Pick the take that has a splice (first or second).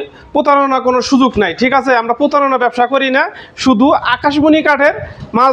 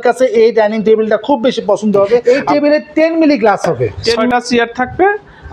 second